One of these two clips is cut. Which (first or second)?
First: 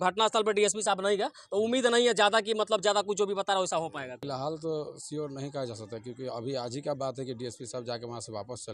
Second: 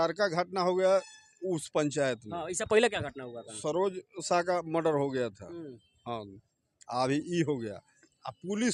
first